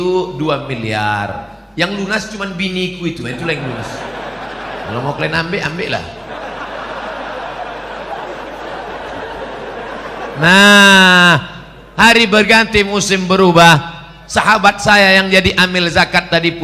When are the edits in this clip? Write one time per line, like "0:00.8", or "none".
0:08.2